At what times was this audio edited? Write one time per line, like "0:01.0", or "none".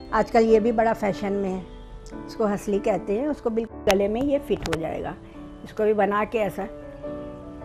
none